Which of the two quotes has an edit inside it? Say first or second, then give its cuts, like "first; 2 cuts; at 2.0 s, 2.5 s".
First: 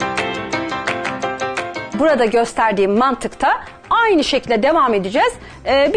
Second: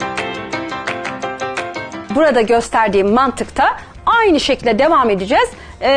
first; 1 cut; at 1.9 s